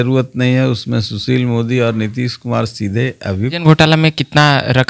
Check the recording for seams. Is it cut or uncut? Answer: cut